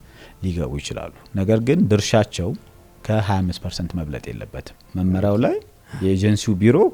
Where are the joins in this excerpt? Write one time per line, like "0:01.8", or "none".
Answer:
0:04.9